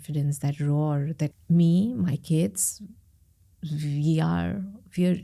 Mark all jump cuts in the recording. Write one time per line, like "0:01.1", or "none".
0:01.4

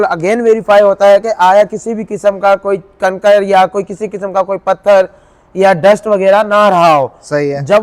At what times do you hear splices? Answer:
none

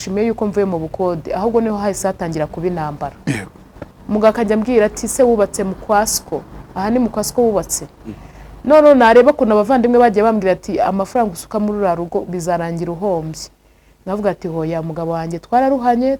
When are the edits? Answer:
none

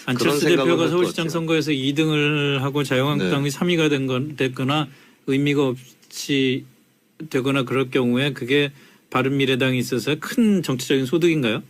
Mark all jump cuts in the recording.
none

